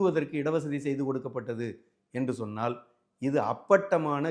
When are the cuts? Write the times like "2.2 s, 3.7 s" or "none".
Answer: none